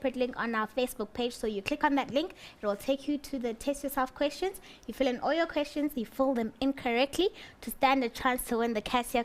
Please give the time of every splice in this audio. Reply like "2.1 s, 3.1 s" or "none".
2.4 s